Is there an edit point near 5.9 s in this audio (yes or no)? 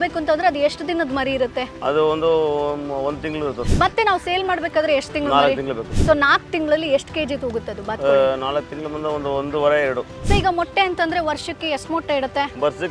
yes